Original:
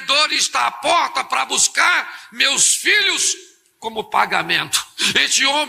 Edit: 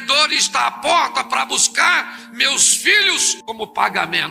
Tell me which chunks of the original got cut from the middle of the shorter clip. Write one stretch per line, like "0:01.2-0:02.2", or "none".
0:03.3-0:03.7